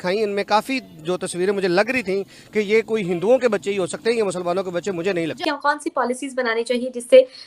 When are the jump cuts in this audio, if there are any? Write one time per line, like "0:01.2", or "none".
0:05.3